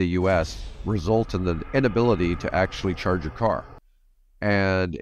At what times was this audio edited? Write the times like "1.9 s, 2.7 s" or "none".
none